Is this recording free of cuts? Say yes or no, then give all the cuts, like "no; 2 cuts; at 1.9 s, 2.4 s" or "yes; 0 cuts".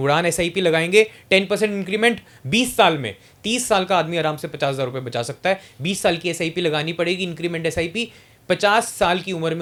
yes; 0 cuts